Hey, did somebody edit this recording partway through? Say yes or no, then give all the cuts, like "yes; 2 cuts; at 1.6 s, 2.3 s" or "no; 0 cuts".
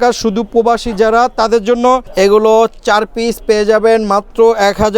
yes; 1 cut; at 2.1 s